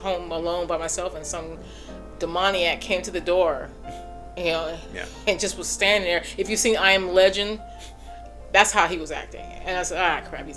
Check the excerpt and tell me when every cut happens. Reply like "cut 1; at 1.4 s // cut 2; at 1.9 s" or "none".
none